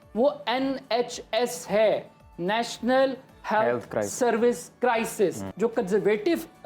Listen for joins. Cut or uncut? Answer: cut